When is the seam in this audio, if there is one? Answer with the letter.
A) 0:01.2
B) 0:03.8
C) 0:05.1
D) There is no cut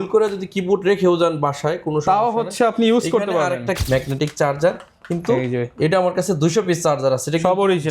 B